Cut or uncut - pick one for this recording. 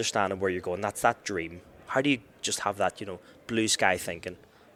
uncut